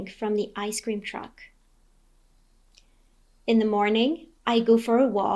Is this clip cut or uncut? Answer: cut